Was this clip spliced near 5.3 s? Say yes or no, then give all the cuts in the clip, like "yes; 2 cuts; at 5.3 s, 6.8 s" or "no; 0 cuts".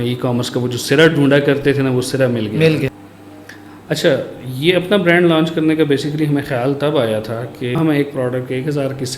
no; 2 cuts; at 3.0 s, 7.7 s